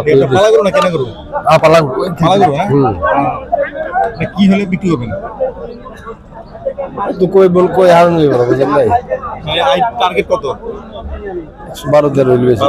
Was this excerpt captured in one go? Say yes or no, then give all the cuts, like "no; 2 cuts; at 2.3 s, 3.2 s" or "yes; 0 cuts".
yes; 0 cuts